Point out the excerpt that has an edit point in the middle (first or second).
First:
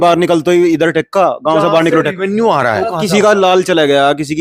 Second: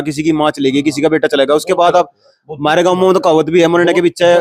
first